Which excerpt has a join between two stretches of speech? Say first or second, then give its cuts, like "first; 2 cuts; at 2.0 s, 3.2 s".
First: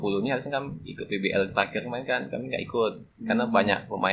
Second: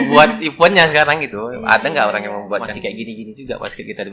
second; 1 cut; at 2.7 s